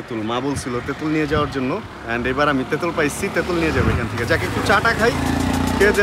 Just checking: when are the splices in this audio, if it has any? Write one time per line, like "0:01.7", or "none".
none